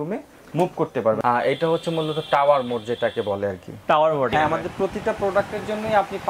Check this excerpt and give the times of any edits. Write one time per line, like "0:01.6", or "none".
0:01.2
0:04.3